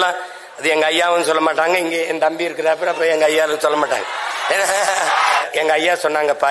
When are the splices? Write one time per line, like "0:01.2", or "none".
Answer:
0:05.4